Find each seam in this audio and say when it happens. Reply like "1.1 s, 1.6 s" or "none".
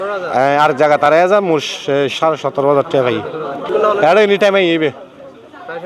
3.7 s